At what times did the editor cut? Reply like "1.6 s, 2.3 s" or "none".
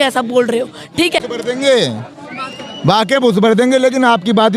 1.2 s